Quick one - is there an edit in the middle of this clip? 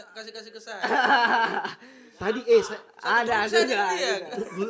no; 0 cuts

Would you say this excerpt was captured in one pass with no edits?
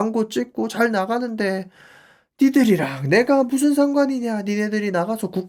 yes; 0 cuts

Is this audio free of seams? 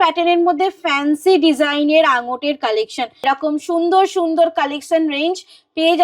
no; 1 cut; at 3.2 s

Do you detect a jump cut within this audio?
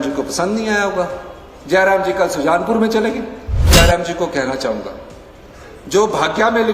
yes; 1 cut; at 3.7 s

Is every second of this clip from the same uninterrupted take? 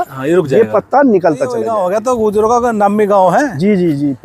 no; 1 cut; at 1.7 s

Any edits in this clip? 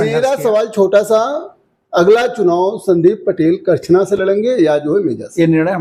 no; 0 cuts

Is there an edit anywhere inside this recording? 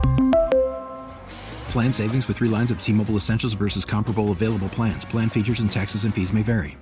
no; 0 cuts

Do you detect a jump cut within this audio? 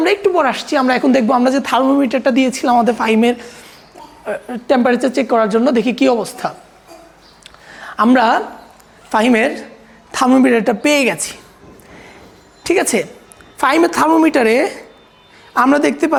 no; 0 cuts

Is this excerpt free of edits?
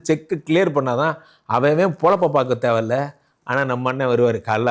yes; 0 cuts

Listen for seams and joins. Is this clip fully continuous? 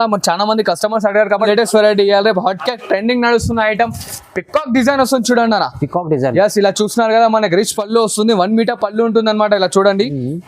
no; 1 cut; at 1.3 s

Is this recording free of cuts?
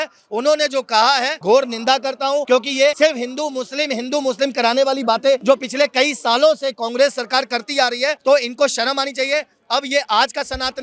no; 4 cuts; at 1.4 s, 2.7 s, 5.4 s, 8.2 s

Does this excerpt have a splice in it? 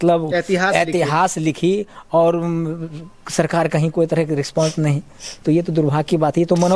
no; 0 cuts

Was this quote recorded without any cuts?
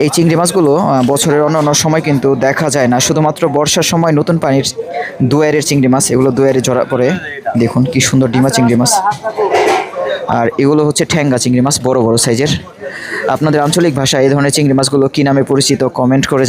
yes; 0 cuts

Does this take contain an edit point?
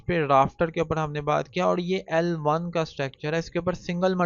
no; 0 cuts

